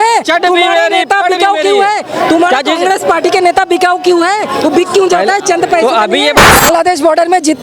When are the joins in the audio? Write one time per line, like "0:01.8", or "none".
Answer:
0:06.6